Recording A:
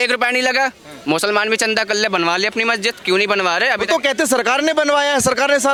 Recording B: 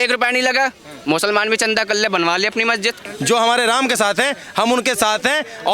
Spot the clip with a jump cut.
B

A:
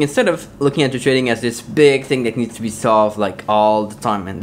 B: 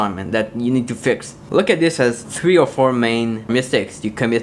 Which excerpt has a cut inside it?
B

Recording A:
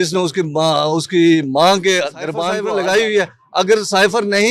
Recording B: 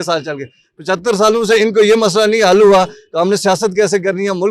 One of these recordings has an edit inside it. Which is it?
A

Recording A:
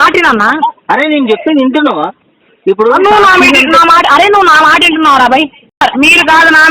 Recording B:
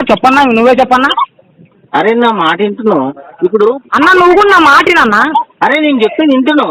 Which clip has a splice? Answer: A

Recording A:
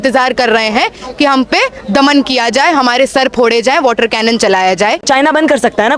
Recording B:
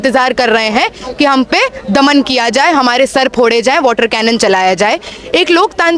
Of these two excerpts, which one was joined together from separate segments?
A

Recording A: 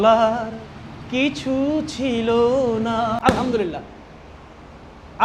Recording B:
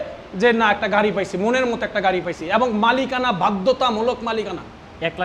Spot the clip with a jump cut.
A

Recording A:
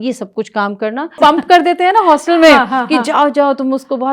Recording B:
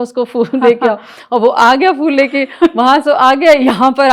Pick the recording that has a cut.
A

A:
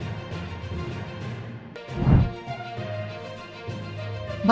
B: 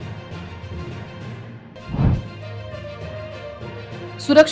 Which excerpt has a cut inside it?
A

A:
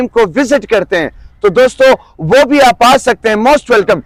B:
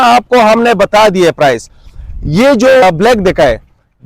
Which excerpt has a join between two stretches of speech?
B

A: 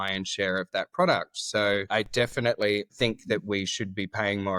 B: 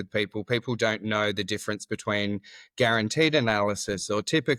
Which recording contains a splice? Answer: A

